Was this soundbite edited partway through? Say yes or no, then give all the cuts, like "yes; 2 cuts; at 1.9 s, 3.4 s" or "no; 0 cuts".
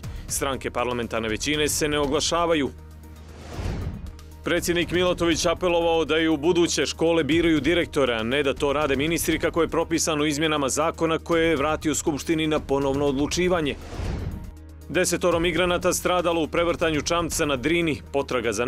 no; 0 cuts